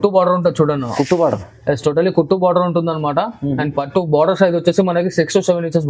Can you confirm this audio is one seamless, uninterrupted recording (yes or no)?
yes